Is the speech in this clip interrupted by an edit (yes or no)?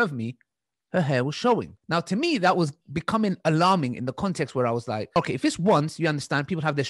yes